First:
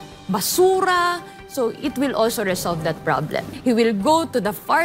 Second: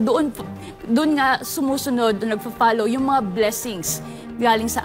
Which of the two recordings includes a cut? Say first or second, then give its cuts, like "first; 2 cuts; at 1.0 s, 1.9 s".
first; 1 cut; at 3.5 s